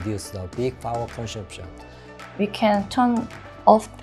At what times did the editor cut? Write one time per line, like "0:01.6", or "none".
0:02.2